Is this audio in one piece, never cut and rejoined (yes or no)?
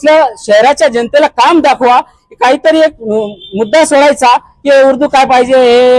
yes